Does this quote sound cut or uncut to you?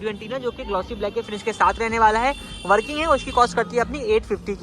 uncut